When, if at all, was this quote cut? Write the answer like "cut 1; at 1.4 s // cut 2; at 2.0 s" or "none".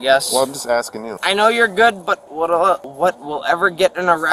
cut 1; at 1.2 s // cut 2; at 2.9 s